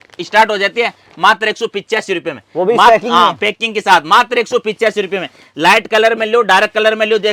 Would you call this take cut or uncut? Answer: uncut